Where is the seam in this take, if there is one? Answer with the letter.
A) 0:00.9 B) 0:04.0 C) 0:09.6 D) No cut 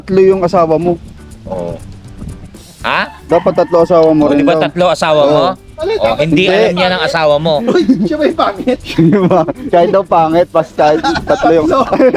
D